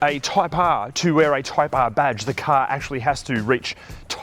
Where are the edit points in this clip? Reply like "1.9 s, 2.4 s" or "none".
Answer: none